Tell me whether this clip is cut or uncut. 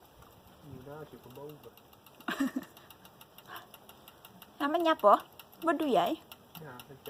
uncut